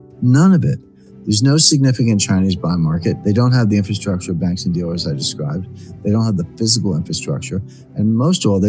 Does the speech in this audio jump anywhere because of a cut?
yes; 1 cut; at 3.2 s

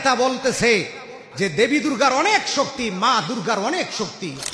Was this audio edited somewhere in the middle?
no; 0 cuts

